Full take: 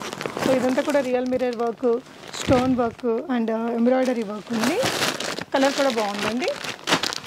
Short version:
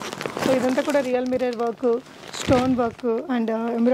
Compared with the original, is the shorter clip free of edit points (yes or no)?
yes